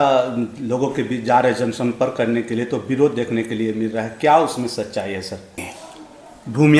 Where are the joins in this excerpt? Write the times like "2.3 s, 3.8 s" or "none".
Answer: 5.7 s